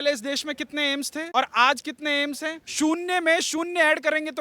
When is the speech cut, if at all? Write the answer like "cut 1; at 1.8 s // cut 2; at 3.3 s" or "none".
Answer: cut 1; at 2.7 s